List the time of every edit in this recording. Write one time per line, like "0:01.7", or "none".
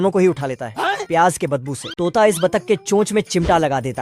0:02.0